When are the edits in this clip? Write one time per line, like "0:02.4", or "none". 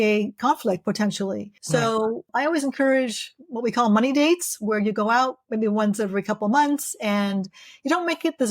0:01.5
0:02.2